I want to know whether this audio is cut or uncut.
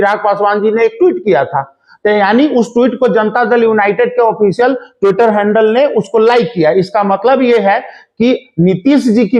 uncut